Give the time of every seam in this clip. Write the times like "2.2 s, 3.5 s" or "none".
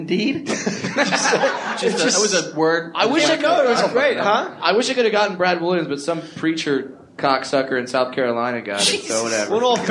none